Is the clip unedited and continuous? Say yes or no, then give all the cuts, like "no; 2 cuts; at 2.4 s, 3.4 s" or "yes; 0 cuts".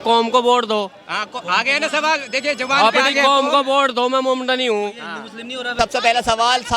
no; 1 cut; at 5.8 s